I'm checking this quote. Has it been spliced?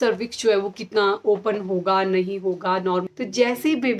yes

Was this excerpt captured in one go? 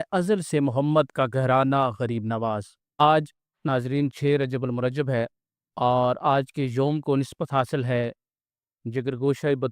no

